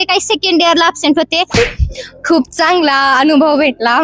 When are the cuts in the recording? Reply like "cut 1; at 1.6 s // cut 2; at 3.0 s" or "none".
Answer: cut 1; at 1.6 s